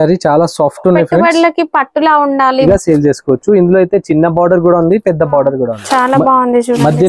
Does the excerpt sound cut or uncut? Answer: cut